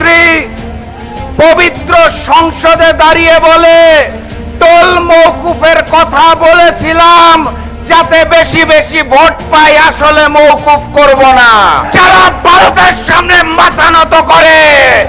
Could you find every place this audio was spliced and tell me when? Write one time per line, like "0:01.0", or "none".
0:11.9

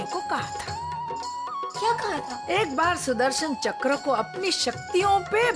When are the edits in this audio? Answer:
0:02.4

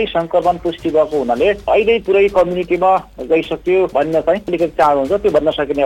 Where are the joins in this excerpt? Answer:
0:01.7
0:04.2

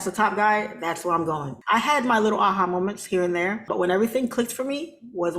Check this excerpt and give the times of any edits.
0:01.5
0:03.7

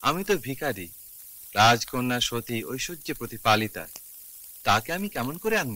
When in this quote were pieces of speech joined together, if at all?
none

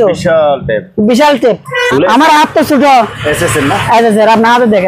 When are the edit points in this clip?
0:01.9

